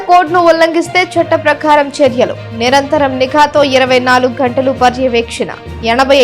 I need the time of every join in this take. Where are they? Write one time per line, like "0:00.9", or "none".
none